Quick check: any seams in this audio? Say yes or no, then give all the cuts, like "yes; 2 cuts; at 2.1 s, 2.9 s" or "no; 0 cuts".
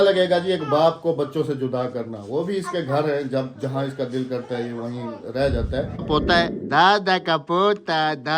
yes; 1 cut; at 6.0 s